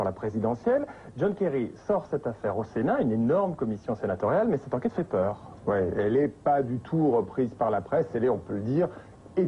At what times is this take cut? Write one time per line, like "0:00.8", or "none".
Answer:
0:04.1